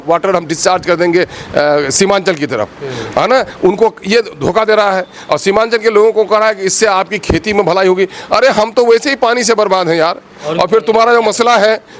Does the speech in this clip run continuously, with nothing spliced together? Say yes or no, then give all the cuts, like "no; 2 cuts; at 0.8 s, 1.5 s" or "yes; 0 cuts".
yes; 0 cuts